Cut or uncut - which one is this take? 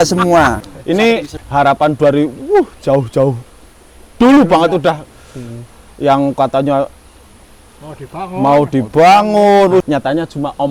cut